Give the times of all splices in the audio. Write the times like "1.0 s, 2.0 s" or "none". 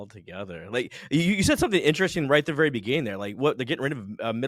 none